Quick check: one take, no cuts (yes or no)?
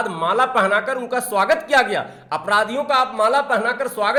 yes